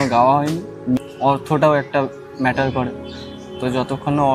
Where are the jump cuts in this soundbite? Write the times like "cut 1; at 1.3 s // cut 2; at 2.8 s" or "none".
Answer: cut 1; at 1.1 s